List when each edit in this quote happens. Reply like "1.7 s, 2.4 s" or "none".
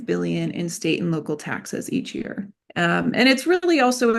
2.6 s

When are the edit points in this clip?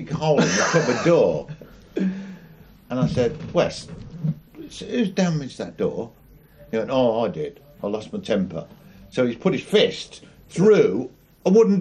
none

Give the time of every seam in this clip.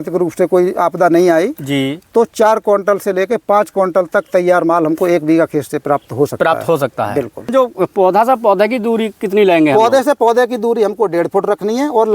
7.5 s

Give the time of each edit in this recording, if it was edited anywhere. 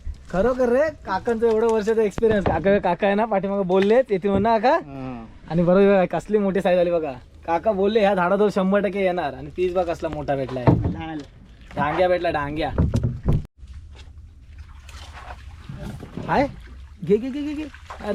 13.4 s

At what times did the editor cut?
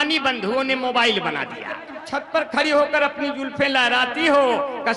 1.9 s

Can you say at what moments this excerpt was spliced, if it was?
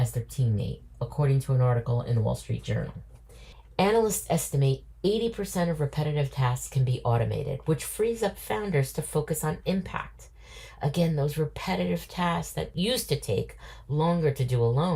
12.7 s

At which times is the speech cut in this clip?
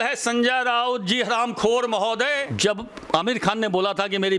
2.5 s

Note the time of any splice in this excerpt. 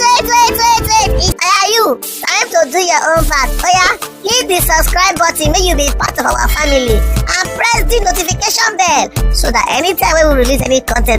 1.4 s

